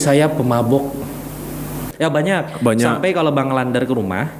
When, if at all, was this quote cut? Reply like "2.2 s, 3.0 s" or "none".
1.8 s